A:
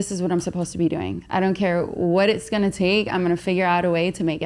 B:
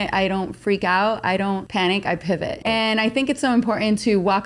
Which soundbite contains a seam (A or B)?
B